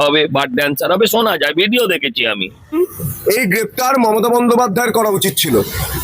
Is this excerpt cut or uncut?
cut